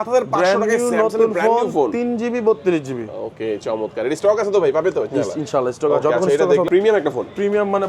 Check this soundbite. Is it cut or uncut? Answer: cut